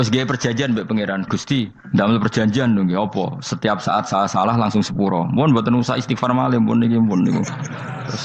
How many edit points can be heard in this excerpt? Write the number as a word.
one